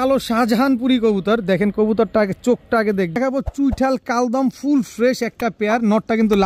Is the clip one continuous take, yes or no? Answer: no